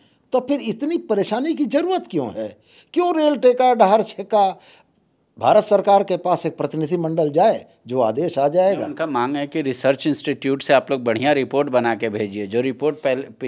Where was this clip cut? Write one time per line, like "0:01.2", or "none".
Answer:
none